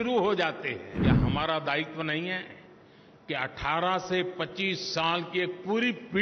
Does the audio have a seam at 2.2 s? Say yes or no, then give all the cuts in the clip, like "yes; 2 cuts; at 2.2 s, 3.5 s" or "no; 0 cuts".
no; 1 cut; at 0.9 s